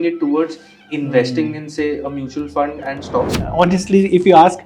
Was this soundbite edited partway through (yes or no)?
yes